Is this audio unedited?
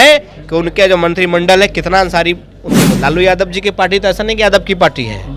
no; 1 cut; at 3.0 s

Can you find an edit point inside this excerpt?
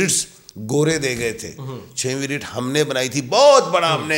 no; 0 cuts

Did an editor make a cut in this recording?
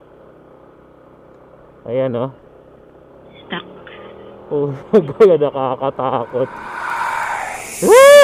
no; 0 cuts

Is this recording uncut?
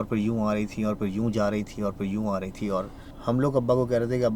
no; 1 cut; at 3.0 s

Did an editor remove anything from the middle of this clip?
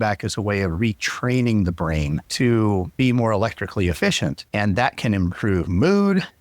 yes; 3 cuts; at 2.2 s, 2.9 s, 4.4 s

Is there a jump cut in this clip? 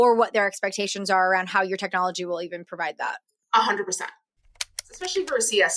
yes; 1 cut; at 4.6 s

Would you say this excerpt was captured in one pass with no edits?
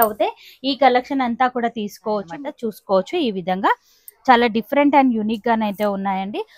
no; 1 cut; at 2.3 s

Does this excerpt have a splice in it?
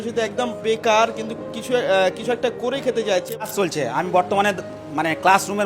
yes; 1 cut; at 3.5 s

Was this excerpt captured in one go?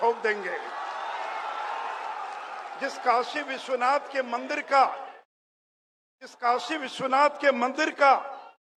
yes; 0 cuts

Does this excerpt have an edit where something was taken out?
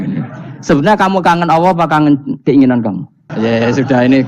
yes; 1 cut; at 3.2 s

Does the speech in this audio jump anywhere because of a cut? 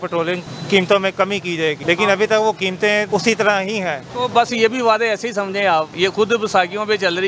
yes; 4 cuts; at 1.8 s, 3.1 s, 4.0 s, 5.9 s

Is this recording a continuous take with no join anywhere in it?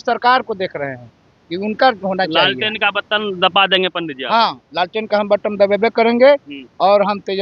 yes; 0 cuts

